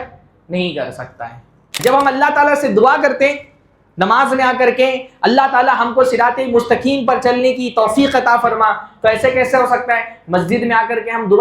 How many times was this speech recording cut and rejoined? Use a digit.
1